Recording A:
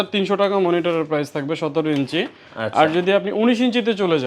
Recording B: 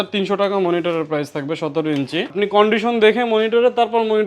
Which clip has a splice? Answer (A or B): B